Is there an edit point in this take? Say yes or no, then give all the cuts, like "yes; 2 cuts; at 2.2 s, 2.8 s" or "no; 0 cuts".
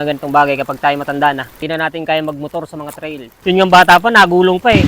yes; 2 cuts; at 1.5 s, 3.3 s